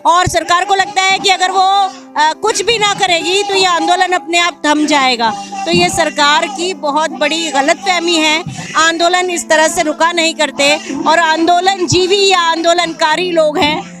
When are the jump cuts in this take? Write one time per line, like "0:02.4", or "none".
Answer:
none